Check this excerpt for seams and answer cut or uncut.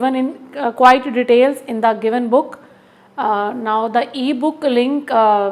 uncut